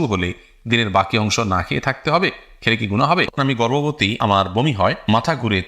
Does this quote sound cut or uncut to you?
cut